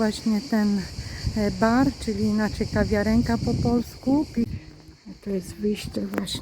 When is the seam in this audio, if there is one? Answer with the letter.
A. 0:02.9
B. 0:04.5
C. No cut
B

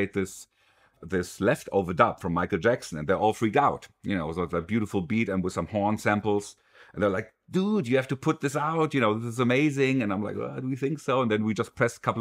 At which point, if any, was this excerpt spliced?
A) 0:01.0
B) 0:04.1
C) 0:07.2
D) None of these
A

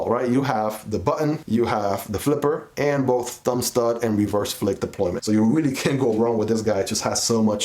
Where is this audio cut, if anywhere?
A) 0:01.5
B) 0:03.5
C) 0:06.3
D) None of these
D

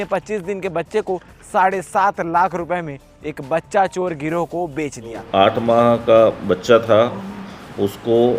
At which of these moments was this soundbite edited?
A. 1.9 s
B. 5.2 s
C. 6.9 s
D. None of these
B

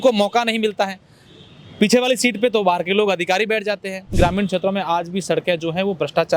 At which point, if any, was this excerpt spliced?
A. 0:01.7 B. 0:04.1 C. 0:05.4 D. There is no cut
B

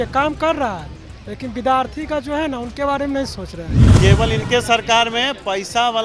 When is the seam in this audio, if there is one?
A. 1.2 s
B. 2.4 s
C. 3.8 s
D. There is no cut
C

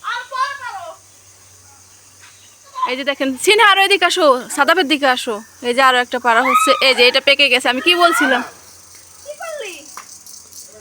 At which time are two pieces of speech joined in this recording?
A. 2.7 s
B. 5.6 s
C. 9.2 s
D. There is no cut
A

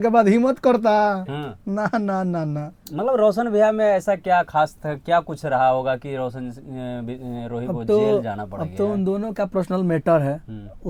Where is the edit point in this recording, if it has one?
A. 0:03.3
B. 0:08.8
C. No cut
C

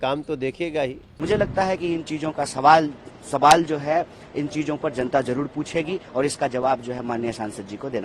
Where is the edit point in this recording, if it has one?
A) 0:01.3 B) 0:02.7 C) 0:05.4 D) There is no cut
A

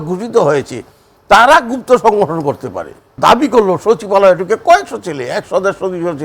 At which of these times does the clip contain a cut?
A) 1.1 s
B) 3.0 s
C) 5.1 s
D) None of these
B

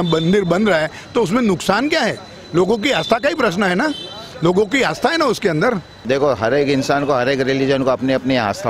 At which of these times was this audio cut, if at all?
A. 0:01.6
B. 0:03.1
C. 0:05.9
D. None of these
C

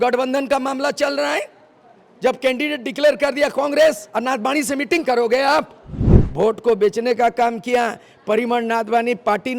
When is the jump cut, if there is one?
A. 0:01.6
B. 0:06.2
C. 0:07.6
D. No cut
B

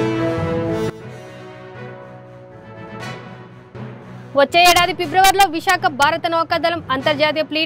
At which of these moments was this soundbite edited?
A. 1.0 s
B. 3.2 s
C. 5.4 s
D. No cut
B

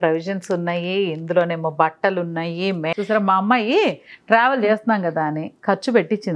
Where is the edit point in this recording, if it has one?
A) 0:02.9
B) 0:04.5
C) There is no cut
A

